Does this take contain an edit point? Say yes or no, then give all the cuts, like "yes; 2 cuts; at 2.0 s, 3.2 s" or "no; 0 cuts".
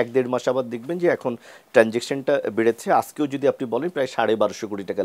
no; 0 cuts